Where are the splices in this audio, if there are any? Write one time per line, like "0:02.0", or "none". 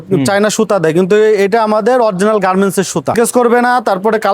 0:03.1